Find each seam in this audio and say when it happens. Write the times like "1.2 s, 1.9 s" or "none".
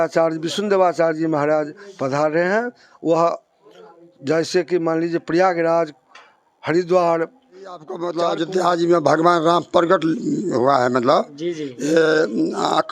8.0 s